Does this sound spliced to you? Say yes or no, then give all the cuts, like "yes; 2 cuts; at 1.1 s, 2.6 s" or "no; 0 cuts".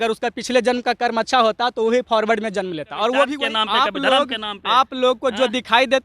yes; 1 cut; at 3.4 s